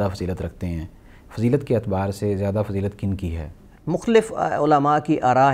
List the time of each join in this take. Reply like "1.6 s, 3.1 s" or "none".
none